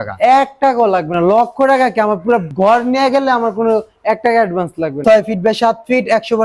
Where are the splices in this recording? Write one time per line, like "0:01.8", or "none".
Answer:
0:02.5
0:05.0